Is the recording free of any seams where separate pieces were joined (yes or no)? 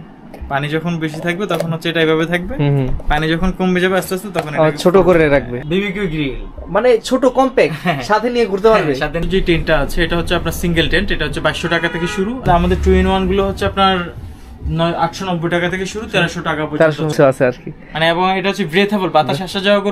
no